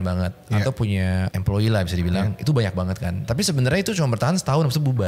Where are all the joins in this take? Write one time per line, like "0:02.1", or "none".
0:01.3
0:03.2